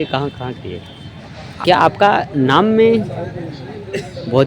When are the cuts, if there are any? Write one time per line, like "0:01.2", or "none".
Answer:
0:01.4

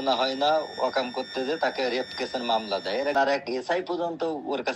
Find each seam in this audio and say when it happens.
0:03.1

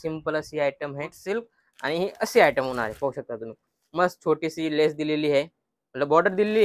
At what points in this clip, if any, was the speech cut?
0:01.2

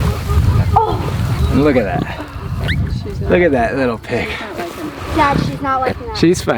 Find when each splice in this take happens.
none

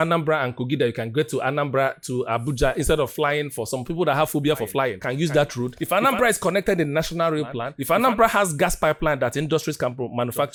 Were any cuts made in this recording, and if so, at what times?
none

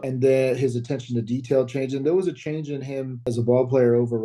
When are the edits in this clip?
none

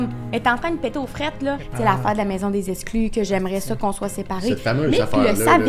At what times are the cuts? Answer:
0:01.7

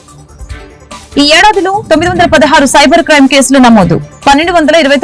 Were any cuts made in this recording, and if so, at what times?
0:01.1

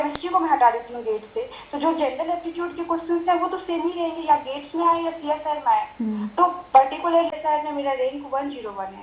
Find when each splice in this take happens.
0:07.3

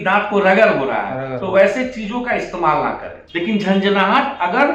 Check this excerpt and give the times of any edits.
0:03.2

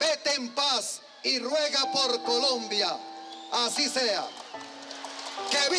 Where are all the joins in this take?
none

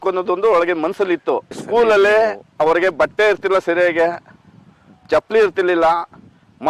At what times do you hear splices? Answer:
0:01.5

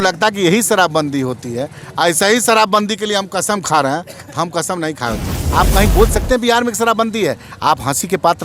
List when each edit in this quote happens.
0:05.4

